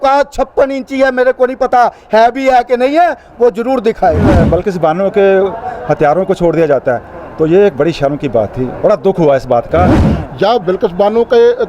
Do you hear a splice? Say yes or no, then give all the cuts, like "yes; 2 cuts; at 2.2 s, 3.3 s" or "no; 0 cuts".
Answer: yes; 2 cuts; at 4.4 s, 10.0 s